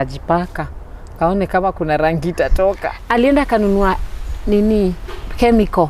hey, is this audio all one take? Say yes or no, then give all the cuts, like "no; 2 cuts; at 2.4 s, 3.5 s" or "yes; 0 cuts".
no; 1 cut; at 2.9 s